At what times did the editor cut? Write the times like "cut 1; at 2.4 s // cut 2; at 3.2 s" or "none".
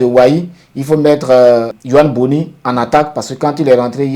cut 1; at 1.8 s